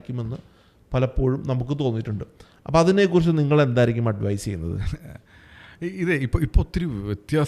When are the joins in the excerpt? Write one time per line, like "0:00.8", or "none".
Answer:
none